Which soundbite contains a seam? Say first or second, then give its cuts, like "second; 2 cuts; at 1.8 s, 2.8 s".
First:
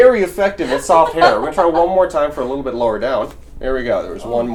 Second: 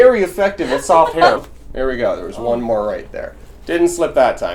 second; 1 cut; at 1.4 s